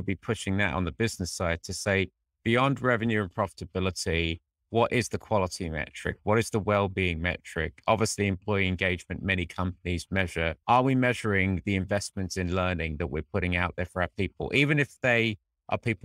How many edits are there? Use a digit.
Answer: 0